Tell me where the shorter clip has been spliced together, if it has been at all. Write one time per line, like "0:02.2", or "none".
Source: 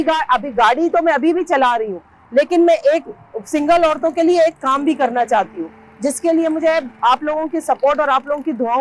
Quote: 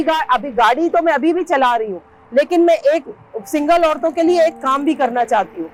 none